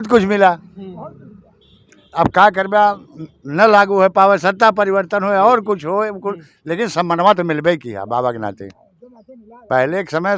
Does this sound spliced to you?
no; 0 cuts

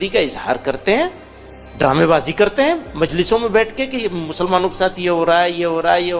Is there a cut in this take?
no; 0 cuts

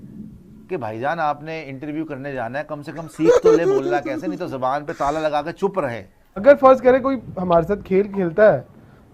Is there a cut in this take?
yes; 1 cut; at 6.4 s

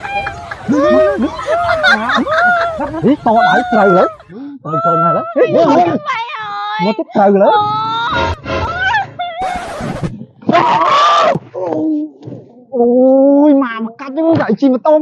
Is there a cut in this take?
yes; 1 cut; at 9.6 s

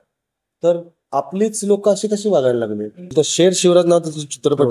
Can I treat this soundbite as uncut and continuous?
no; 1 cut; at 3.1 s

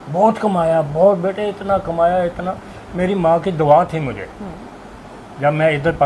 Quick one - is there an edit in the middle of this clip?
no; 0 cuts

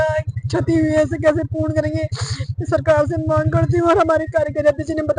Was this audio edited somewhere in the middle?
no; 0 cuts

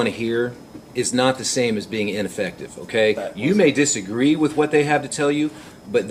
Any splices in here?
no; 0 cuts

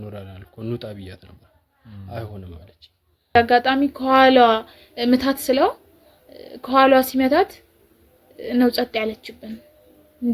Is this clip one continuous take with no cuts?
no; 1 cut; at 3.4 s

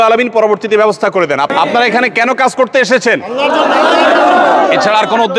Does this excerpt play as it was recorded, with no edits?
no; 1 cut; at 1.5 s

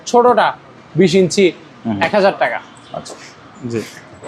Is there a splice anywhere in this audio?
no; 0 cuts

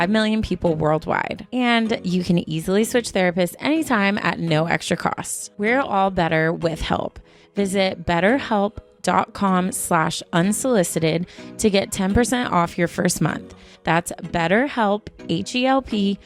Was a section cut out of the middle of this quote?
no; 0 cuts

